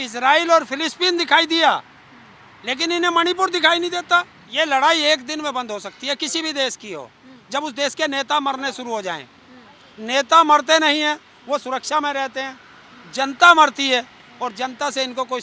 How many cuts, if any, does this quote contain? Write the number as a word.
one